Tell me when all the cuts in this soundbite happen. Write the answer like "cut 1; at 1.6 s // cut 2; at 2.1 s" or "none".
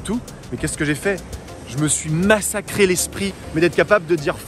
cut 1; at 3.3 s

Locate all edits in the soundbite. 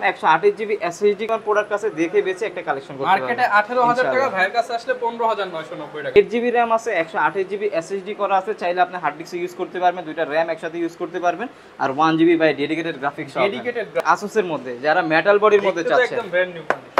cut 1; at 1.3 s // cut 2; at 6.2 s // cut 3; at 14.0 s

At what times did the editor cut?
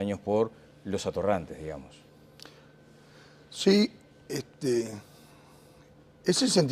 cut 1; at 5.3 s

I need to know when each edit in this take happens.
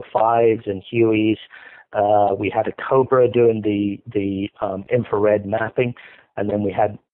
none

